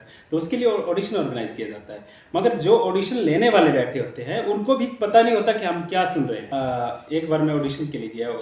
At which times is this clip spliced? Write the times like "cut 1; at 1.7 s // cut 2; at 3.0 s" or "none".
cut 1; at 6.4 s